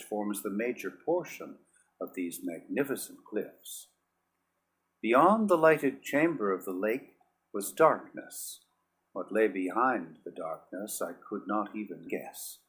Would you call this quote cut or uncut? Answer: cut